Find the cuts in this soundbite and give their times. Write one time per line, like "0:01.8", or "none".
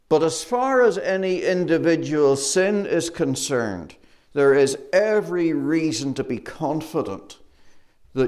none

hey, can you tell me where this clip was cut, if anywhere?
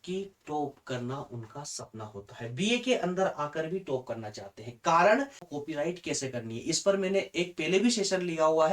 0:05.5

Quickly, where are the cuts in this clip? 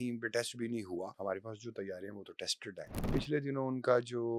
0:01.1
0:03.1

